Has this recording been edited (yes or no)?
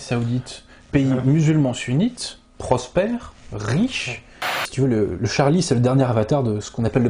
yes